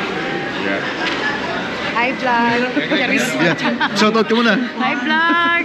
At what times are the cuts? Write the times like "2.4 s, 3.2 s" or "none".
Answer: 1.9 s